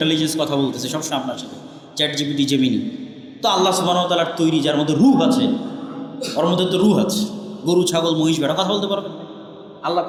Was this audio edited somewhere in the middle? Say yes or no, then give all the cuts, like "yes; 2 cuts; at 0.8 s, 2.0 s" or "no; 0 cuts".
no; 0 cuts